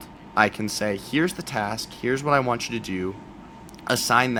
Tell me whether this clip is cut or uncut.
uncut